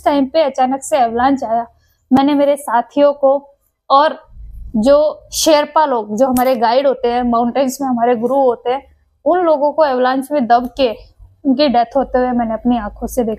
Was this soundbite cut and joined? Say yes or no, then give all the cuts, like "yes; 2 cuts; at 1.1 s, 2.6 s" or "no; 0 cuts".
no; 0 cuts